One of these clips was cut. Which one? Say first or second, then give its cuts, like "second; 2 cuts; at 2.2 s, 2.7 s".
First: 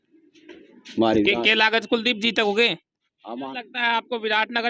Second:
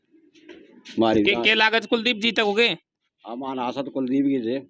first; 1 cut; at 3.5 s